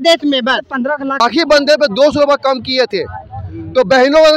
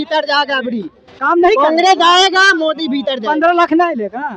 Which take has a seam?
first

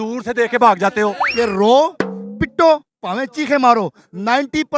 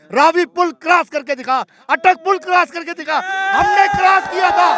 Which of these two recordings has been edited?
first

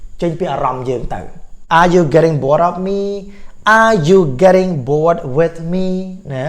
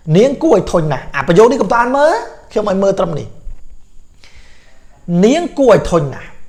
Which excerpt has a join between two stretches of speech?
first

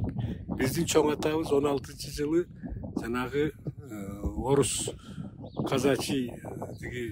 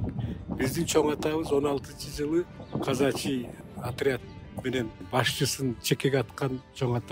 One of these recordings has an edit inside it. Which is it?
second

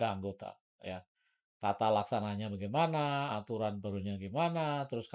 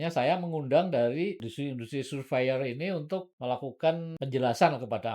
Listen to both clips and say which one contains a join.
second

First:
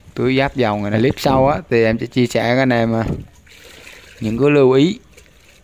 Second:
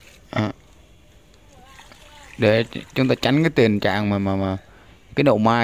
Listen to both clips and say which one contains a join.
first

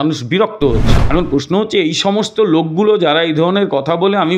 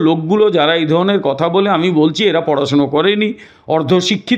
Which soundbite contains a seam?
first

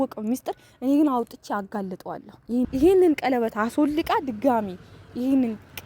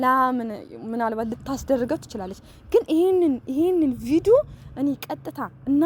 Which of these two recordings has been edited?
first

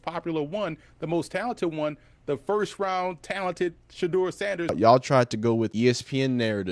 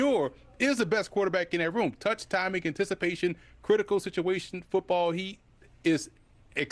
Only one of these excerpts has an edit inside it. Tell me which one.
first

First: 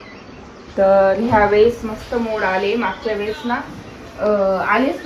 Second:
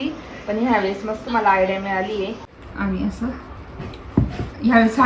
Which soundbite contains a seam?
second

